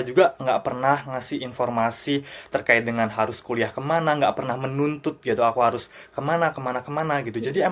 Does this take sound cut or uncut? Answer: uncut